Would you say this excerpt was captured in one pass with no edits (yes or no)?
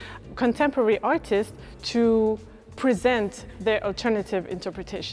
yes